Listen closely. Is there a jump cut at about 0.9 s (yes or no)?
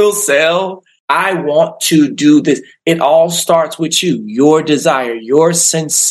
yes